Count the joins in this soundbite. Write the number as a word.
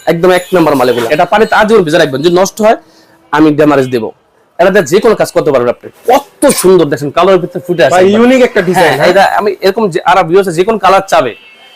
two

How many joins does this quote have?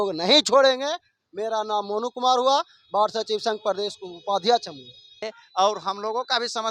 one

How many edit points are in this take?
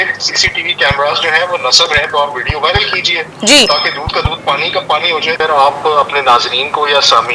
two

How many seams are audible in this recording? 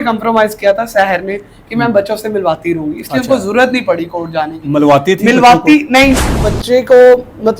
one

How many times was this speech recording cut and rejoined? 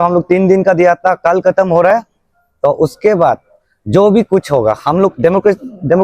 zero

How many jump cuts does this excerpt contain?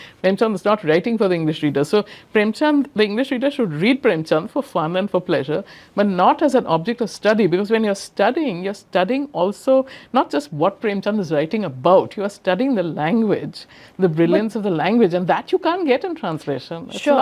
zero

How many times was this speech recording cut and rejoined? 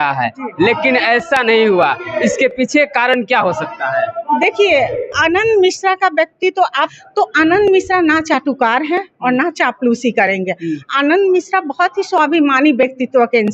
one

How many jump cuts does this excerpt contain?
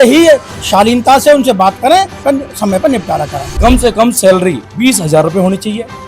two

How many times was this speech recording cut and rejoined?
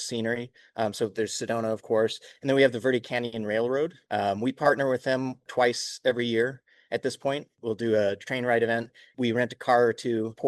two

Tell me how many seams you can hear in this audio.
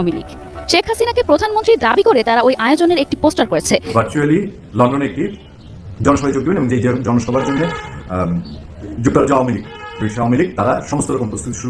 one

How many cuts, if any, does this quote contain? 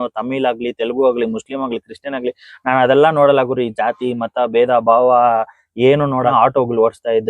one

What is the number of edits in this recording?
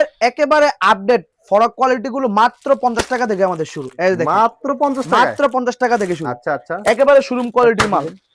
zero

